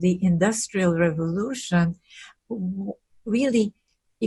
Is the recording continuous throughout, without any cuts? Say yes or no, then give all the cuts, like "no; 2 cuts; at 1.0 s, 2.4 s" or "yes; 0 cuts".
yes; 0 cuts